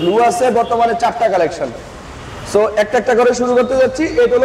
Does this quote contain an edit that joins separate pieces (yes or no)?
no